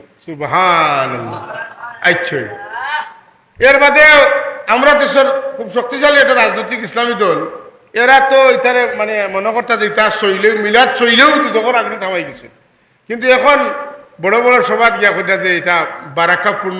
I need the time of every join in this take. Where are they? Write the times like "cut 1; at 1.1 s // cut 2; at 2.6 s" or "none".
none